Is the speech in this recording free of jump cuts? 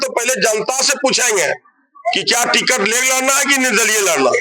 yes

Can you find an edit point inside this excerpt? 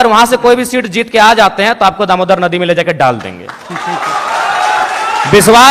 no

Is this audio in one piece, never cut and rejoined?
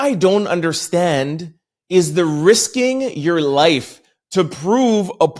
yes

